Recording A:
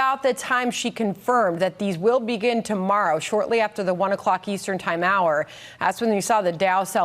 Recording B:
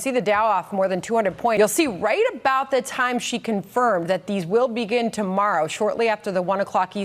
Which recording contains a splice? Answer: B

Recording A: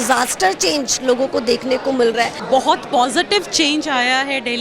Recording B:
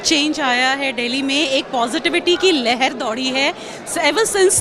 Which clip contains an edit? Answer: A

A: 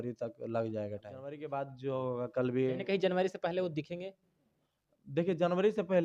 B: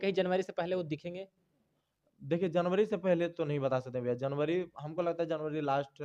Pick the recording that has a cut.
A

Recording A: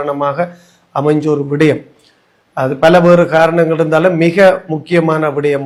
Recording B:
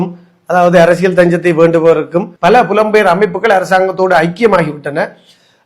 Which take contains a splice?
B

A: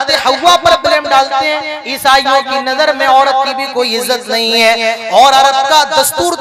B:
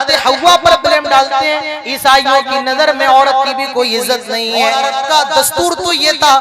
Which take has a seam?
B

